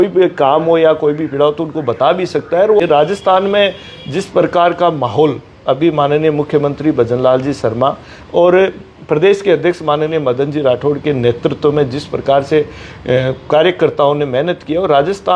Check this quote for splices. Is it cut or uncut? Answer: cut